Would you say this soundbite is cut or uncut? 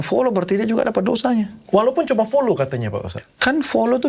uncut